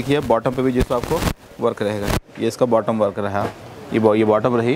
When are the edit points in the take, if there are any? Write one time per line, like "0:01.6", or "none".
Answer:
none